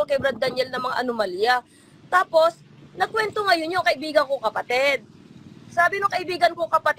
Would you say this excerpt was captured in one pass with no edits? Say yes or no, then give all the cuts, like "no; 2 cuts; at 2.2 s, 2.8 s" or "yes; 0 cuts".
yes; 0 cuts